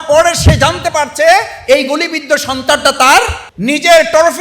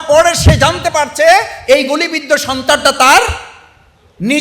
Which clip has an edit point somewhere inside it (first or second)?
first